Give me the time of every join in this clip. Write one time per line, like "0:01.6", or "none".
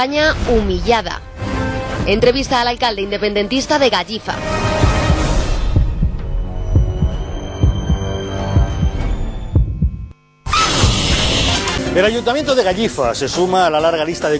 0:12.7